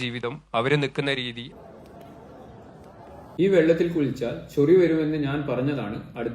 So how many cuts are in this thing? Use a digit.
1